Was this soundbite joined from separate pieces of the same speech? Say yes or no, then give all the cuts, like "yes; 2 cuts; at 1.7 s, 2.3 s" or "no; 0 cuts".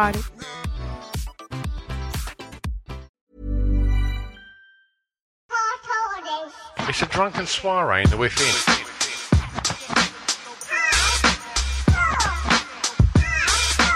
yes; 2 cuts; at 3.1 s, 5.4 s